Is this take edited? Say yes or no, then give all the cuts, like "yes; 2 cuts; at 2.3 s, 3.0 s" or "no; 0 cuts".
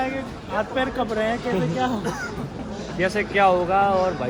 no; 0 cuts